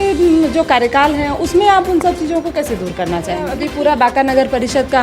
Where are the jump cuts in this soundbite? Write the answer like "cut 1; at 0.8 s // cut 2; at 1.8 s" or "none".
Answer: cut 1; at 3.6 s